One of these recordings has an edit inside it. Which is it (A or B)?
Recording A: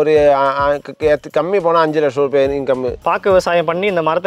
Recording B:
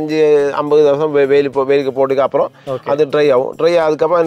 A